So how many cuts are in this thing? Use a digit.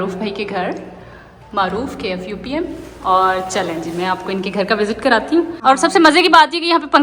1